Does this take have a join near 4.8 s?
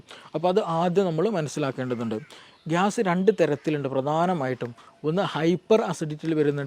no; 1 cut; at 2.4 s

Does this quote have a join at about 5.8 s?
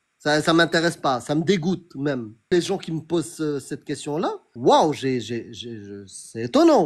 no; 2 cuts; at 2.5 s, 4.5 s

